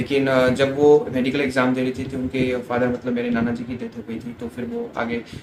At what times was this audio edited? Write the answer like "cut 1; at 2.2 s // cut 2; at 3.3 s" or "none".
none